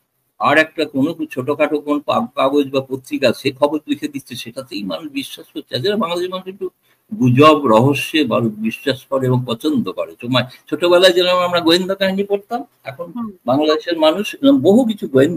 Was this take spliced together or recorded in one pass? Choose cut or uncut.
uncut